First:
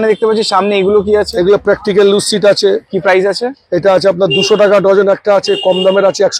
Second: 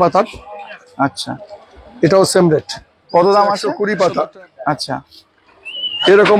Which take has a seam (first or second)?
second